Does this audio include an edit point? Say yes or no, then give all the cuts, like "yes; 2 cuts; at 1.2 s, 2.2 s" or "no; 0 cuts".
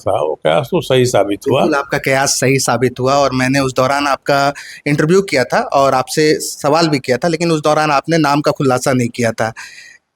no; 0 cuts